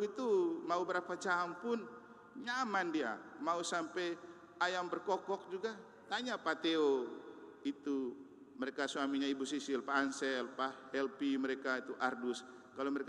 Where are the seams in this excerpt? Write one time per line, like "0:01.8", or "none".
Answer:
none